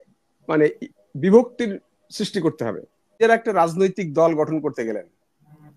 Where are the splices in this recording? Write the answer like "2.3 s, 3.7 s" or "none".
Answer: 3.2 s

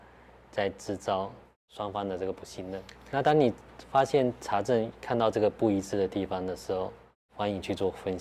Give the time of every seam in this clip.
2.9 s

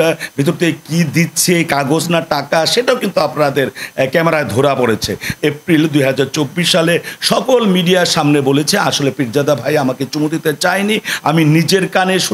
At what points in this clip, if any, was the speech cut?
5.3 s

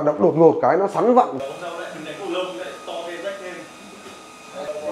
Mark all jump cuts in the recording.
1.3 s

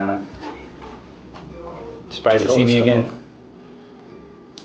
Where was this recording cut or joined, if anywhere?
none

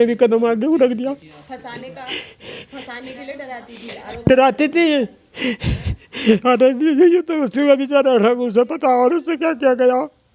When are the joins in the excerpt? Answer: none

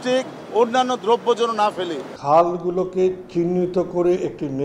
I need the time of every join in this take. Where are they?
2.1 s

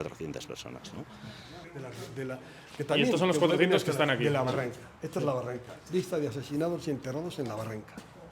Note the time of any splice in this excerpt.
1.6 s

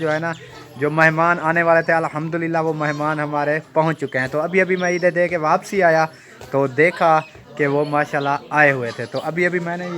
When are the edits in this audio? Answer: none

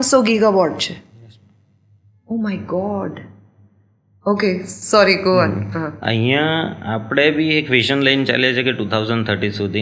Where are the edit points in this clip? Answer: none

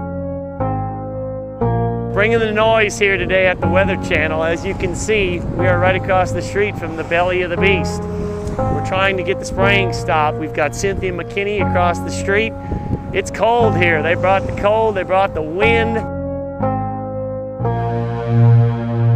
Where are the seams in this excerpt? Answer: 12.1 s

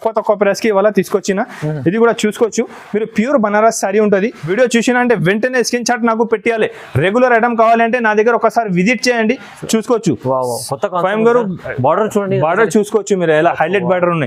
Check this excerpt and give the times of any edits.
4.4 s

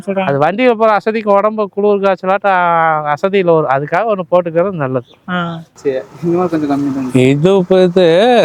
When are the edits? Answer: 5.8 s

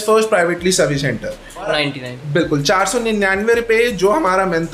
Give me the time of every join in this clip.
1.7 s

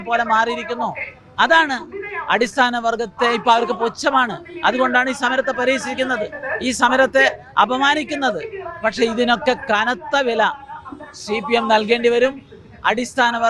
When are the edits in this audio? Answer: none

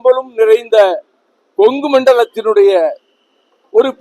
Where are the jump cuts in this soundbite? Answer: none

